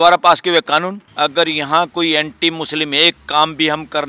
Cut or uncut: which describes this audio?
cut